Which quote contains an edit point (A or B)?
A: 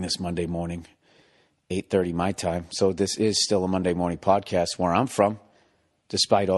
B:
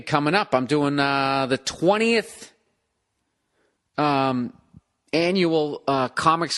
B